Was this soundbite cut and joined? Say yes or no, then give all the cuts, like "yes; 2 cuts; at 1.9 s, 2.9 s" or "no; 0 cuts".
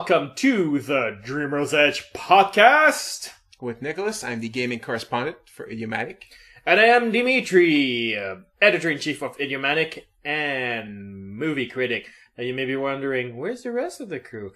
no; 0 cuts